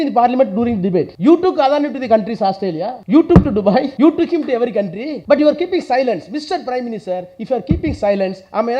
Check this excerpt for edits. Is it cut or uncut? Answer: cut